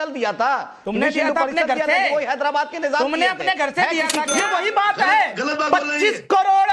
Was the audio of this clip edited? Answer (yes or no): yes